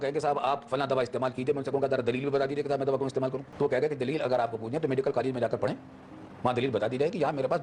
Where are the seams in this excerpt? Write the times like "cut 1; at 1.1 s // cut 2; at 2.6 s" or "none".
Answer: cut 1; at 3.4 s